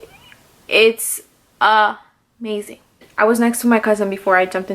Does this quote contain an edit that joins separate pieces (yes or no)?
yes